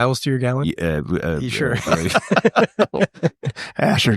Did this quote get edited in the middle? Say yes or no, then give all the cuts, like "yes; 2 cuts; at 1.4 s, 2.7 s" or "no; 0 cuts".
no; 0 cuts